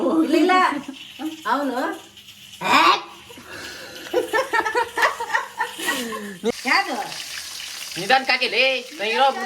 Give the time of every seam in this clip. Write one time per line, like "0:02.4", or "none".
0:06.5